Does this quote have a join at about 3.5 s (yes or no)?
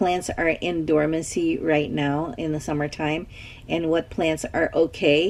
no